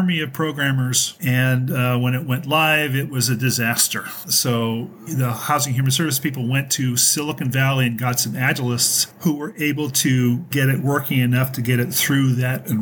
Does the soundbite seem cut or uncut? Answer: cut